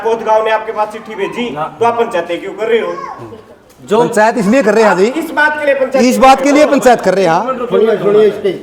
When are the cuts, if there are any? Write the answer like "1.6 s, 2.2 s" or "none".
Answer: none